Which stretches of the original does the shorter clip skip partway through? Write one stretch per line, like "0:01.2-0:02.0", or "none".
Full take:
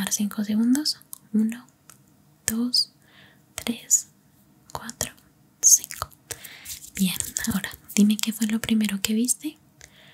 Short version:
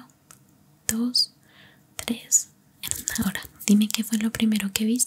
0:04.6-0:07.3